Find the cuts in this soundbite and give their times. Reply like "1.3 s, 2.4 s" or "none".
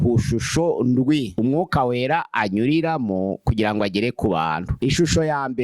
1.3 s, 4.7 s